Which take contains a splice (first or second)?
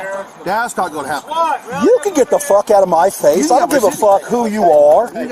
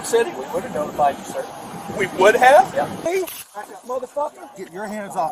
second